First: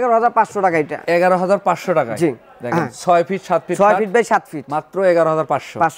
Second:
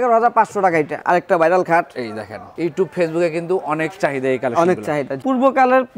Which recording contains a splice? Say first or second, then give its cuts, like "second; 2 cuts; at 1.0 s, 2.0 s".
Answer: second; 2 cuts; at 1.0 s, 5.2 s